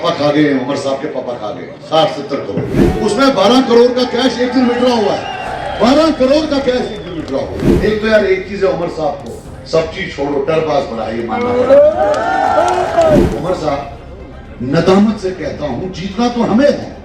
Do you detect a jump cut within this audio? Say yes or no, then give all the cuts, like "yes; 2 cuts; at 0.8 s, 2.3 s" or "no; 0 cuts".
yes; 2 cuts; at 7.6 s, 13.3 s